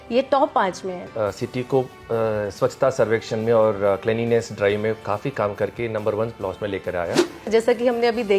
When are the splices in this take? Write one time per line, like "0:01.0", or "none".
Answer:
0:01.1
0:07.4